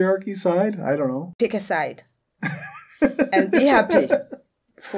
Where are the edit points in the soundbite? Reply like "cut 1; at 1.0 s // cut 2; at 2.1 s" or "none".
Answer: cut 1; at 1.3 s